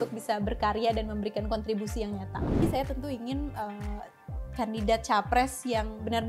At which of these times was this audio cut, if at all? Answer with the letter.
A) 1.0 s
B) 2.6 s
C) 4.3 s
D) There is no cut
B